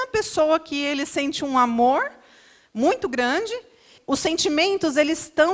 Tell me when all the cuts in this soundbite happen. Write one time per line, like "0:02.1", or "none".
0:03.9